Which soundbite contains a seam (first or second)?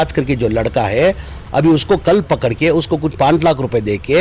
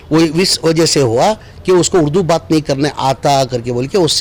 first